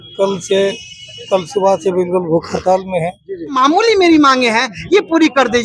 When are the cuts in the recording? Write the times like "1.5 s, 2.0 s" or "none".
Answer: 3.6 s